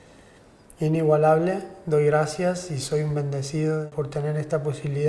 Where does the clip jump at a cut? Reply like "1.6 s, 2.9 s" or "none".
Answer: 3.9 s